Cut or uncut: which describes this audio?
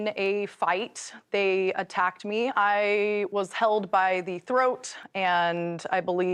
uncut